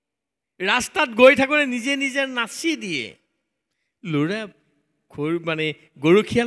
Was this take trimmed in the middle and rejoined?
no; 0 cuts

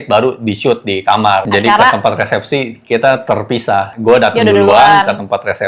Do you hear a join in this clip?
yes; 1 cut; at 1.5 s

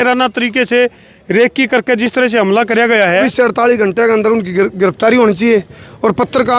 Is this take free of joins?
no; 1 cut; at 3.2 s

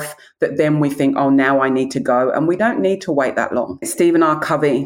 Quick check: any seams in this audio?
yes; 2 cuts; at 2.6 s, 3.9 s

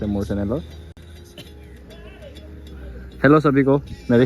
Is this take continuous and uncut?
yes; 0 cuts

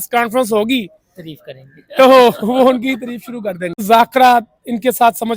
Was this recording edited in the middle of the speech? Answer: yes; 1 cut; at 3.8 s

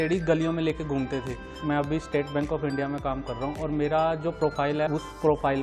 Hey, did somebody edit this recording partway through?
yes; 1 cut; at 1.6 s

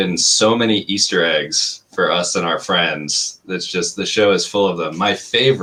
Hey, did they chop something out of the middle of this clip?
no; 0 cuts

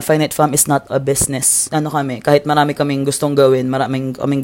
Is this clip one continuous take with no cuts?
no; 1 cut; at 1.7 s

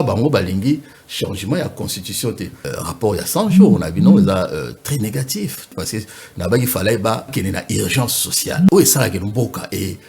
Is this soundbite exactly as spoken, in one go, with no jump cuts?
no; 4 cuts; at 2.6 s, 5.7 s, 7.3 s, 8.7 s

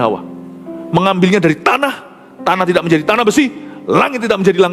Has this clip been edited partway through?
no; 0 cuts

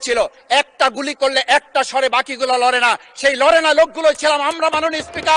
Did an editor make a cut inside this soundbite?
no; 0 cuts

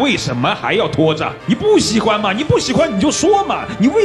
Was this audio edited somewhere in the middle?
no; 0 cuts

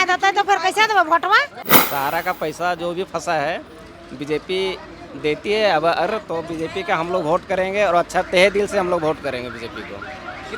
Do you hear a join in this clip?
yes; 1 cut; at 1.7 s

